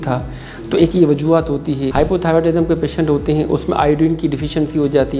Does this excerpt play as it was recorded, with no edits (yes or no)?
no